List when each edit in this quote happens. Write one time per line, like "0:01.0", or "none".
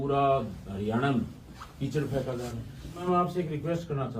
0:03.0